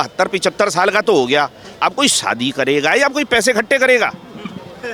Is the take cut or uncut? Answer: uncut